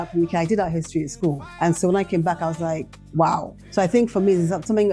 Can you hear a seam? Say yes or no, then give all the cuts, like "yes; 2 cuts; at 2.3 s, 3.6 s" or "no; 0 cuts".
yes; 3 cuts; at 1.5 s, 3.0 s, 3.6 s